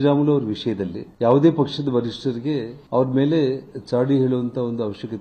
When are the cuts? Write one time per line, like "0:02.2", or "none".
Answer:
0:01.1